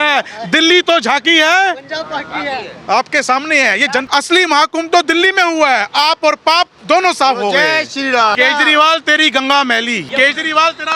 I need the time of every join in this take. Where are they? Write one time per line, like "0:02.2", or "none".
0:04.1
0:08.4
0:10.1